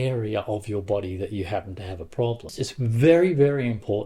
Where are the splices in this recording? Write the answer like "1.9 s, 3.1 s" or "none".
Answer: 2.5 s